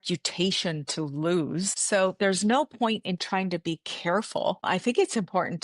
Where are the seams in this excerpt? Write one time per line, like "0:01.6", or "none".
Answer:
0:01.8
0:04.6